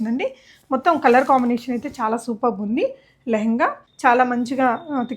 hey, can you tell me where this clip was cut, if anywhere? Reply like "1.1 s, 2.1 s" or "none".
3.9 s